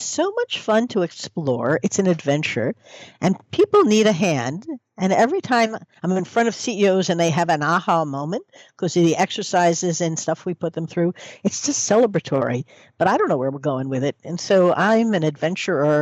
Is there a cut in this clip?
yes; 1 cut; at 5.9 s

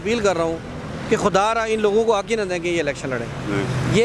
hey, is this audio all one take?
yes; 0 cuts

